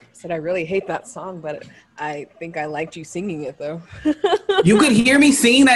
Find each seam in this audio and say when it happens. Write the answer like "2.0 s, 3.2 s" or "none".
4.6 s

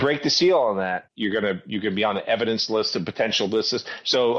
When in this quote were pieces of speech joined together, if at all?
1.1 s

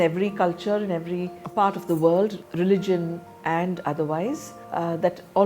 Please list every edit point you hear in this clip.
1.4 s, 4.5 s

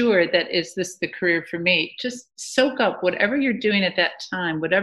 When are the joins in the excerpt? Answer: none

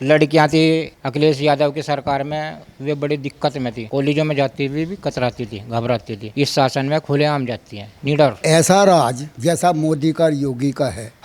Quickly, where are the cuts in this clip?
8.4 s

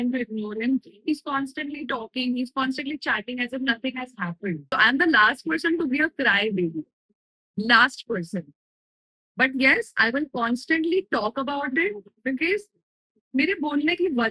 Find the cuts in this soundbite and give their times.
4.6 s

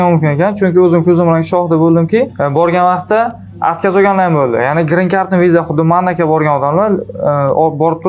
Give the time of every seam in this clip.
none

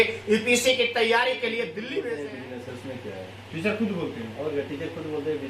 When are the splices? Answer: 2.1 s

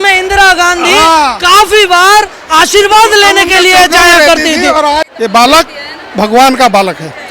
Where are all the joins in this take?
5.1 s

